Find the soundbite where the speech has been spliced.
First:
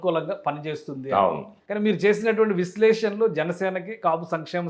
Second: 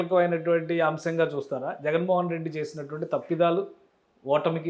first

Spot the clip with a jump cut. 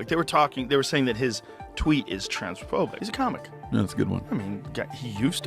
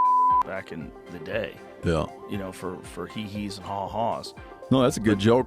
first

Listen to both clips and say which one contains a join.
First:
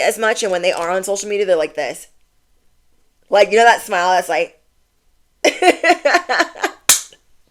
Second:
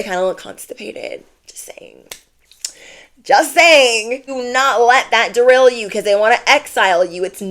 second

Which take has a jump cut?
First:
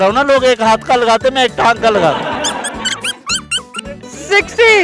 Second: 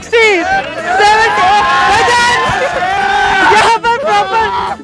first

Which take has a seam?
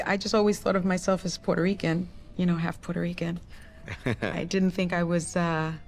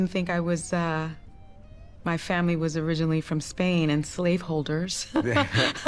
first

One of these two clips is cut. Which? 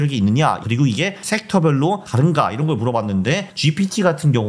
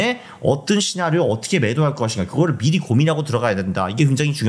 first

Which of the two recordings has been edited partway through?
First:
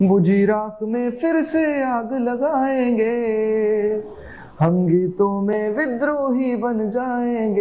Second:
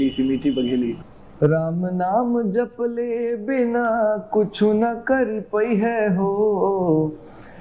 second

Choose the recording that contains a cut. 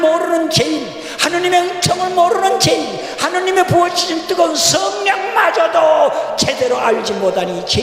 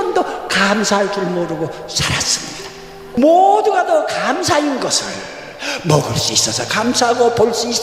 second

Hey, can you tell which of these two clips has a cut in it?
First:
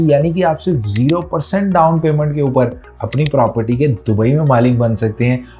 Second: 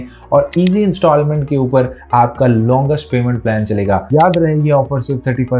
second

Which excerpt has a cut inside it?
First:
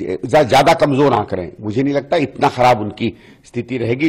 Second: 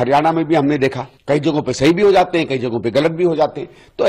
second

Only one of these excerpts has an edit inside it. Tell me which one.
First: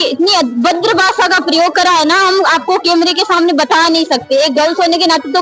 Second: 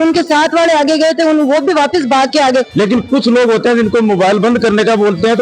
second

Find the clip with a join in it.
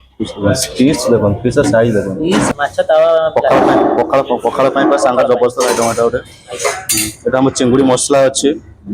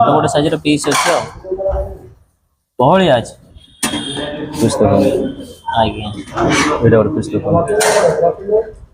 first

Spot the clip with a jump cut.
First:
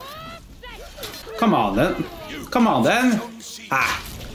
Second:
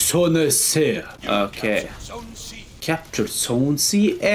first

